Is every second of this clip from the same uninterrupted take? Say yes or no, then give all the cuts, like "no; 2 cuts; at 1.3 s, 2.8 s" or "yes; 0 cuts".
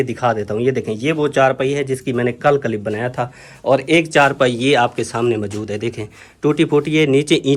yes; 0 cuts